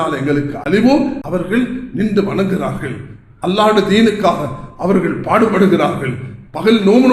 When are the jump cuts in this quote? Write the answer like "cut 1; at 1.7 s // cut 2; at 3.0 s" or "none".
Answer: cut 1; at 1.2 s